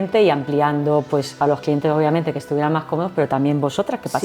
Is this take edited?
yes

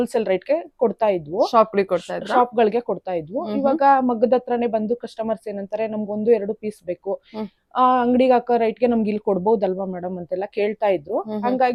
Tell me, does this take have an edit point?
no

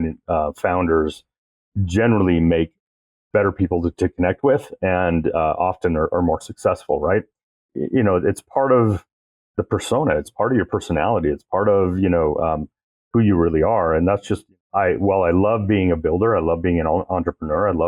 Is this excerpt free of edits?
no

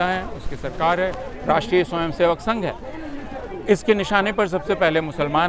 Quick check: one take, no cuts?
yes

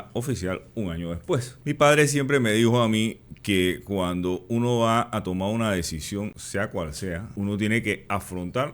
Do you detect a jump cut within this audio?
yes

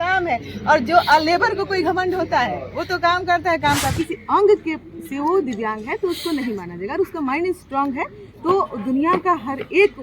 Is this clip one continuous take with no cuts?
no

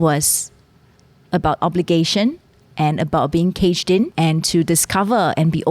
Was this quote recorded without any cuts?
no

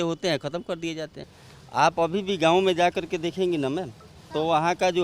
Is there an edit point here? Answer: yes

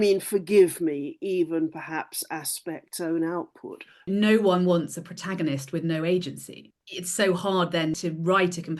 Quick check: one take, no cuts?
no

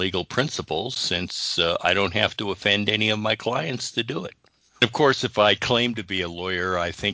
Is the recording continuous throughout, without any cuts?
no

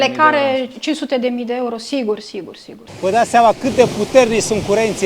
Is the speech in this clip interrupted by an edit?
yes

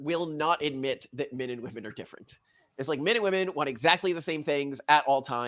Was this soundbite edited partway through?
no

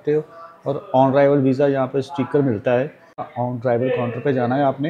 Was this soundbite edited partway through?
yes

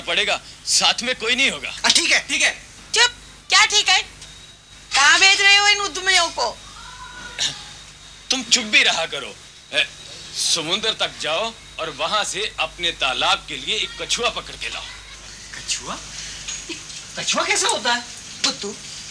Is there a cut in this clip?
no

